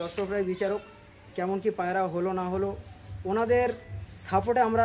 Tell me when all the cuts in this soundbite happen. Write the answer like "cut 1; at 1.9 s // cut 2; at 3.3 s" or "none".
none

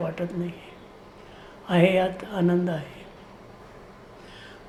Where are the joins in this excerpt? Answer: none

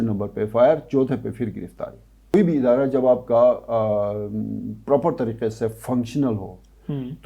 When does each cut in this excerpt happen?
cut 1; at 2.3 s

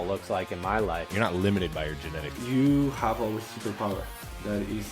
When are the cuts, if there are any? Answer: none

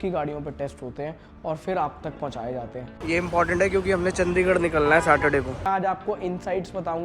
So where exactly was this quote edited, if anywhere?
cut 1; at 2.9 s // cut 2; at 5.7 s

